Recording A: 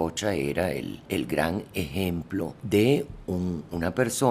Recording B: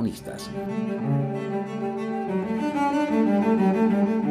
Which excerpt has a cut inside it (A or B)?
A